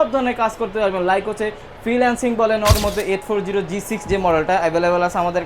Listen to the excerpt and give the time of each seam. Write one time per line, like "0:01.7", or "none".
0:02.8